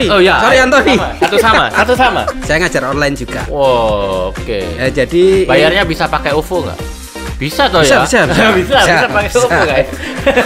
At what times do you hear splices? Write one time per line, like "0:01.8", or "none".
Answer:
0:02.4